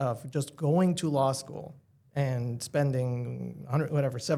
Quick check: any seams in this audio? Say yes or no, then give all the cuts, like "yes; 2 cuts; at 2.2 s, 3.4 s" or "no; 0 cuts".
no; 0 cuts